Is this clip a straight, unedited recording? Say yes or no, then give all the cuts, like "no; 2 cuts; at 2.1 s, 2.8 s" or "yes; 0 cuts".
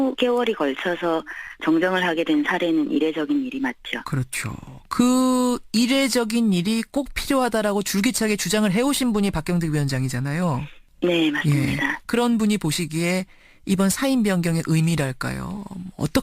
no; 1 cut; at 10.8 s